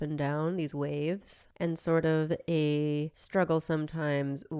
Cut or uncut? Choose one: uncut